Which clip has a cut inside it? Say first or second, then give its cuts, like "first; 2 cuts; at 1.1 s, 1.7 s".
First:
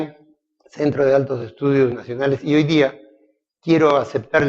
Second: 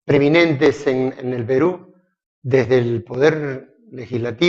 first; 1 cut; at 3.5 s